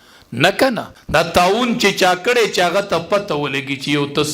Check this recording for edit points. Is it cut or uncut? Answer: cut